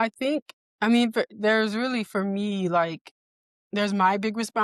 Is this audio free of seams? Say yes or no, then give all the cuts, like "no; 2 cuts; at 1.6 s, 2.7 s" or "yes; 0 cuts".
yes; 0 cuts